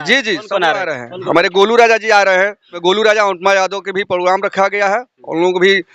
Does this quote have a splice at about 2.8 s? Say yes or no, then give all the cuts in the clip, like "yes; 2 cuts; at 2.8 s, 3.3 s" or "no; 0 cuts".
yes; 1 cut; at 2.8 s